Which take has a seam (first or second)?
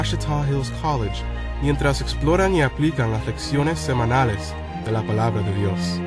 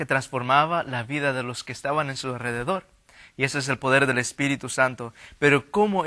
second